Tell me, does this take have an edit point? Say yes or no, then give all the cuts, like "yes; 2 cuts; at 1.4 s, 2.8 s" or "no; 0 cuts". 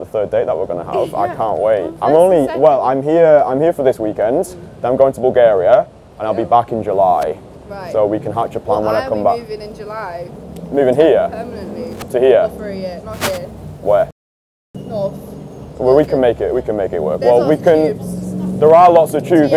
no; 0 cuts